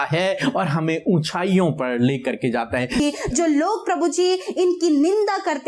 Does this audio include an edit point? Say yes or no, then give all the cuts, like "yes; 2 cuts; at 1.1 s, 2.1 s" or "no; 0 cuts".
yes; 1 cut; at 3.0 s